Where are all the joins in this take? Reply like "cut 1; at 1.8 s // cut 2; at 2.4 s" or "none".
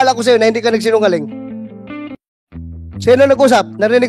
cut 1; at 1.4 s // cut 2; at 3.0 s